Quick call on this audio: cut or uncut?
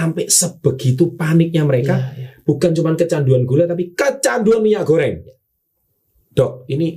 uncut